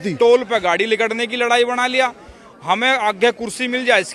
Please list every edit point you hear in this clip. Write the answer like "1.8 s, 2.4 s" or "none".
none